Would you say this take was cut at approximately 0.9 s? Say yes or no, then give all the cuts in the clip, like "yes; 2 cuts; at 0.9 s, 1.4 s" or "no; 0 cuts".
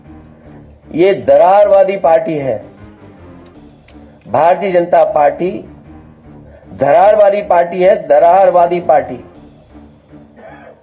yes; 1 cut; at 0.9 s